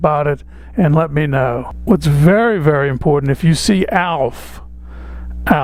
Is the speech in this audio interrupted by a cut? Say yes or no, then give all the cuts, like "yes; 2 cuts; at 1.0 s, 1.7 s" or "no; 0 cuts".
no; 0 cuts